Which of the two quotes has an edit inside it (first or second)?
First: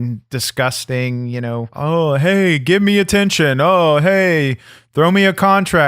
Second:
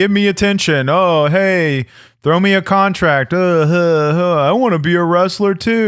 first